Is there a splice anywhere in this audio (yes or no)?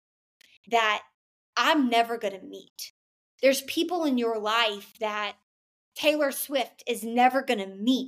no